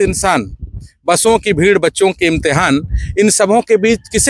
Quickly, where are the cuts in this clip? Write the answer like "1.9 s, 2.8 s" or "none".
none